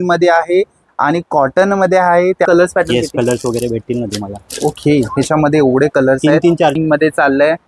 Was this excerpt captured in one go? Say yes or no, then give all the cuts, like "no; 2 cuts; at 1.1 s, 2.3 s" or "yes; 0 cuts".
no; 2 cuts; at 2.5 s, 6.7 s